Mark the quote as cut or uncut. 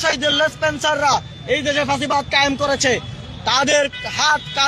uncut